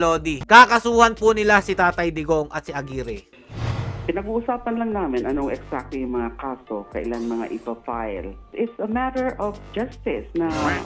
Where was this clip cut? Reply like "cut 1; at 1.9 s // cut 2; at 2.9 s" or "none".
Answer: none